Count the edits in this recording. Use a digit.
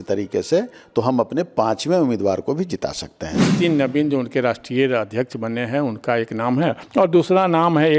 2